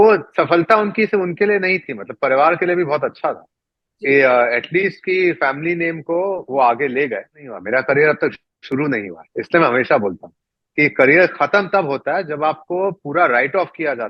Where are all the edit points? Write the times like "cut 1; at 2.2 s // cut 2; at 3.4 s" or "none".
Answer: cut 1; at 7.6 s